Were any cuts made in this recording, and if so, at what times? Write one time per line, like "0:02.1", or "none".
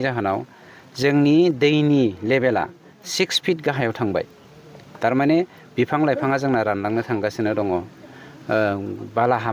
none